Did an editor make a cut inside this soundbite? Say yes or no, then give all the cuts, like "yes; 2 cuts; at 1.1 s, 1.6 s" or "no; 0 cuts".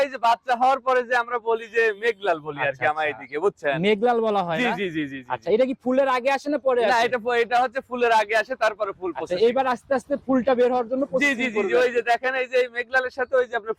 no; 0 cuts